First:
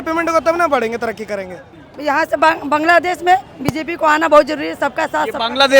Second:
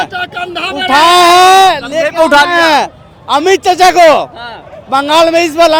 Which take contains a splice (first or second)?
first